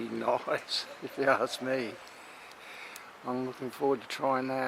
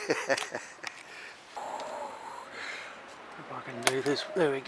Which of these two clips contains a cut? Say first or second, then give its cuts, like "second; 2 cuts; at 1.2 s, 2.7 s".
second; 1 cut; at 1.5 s